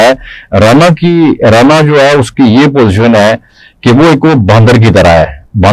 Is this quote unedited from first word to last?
yes; 0 cuts

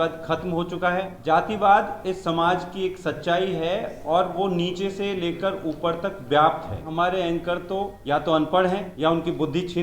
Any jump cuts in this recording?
yes; 4 cuts; at 1.1 s, 6.9 s, 8.0 s, 8.9 s

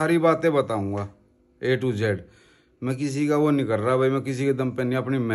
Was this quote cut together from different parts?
no; 0 cuts

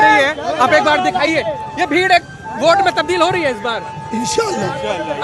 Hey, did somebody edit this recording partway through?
no; 0 cuts

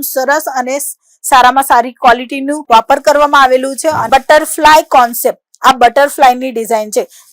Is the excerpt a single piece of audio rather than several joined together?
no; 1 cut; at 4.0 s

